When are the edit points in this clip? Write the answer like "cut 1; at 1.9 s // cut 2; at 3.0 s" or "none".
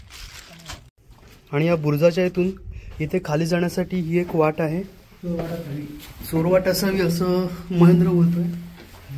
cut 1; at 0.9 s